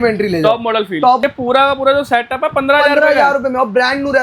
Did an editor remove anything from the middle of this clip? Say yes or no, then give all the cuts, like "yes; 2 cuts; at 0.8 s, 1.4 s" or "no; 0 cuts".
yes; 1 cut; at 1.2 s